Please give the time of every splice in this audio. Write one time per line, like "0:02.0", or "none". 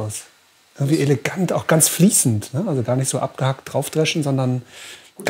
none